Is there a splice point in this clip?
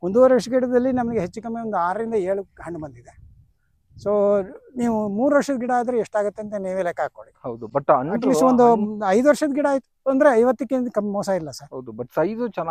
no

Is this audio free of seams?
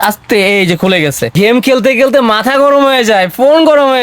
no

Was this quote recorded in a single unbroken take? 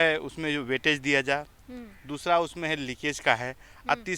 yes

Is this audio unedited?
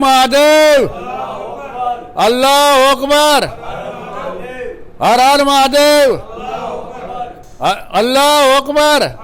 yes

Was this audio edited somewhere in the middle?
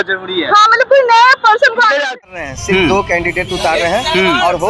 yes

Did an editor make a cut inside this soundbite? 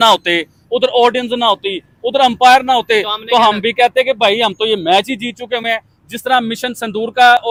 no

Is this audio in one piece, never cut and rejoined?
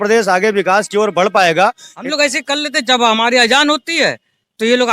no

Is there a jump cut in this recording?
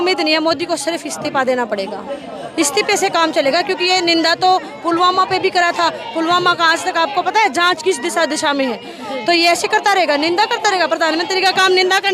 no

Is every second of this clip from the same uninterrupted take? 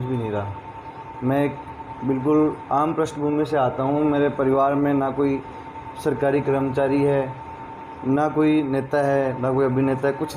yes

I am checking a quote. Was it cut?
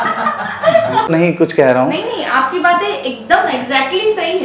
yes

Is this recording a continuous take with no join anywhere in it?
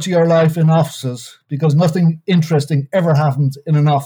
yes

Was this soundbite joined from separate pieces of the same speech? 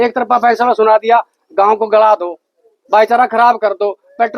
no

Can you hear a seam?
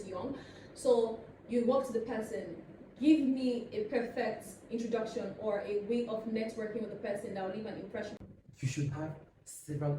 yes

